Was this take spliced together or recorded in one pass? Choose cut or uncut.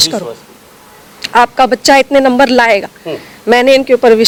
uncut